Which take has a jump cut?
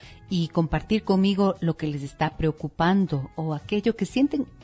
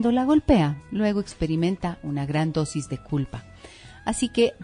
second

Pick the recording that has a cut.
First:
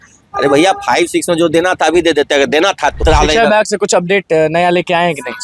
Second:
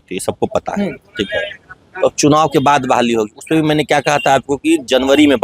first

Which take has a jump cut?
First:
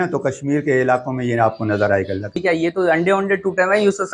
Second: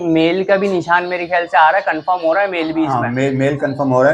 first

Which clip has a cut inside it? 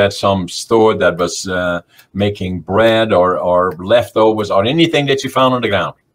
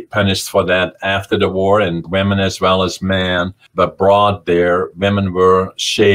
second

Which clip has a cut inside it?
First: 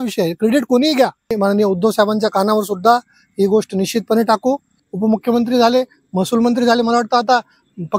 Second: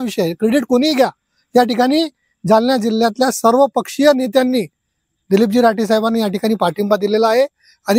first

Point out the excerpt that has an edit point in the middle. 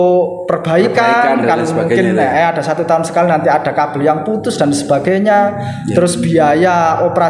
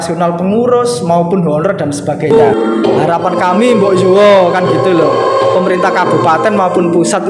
second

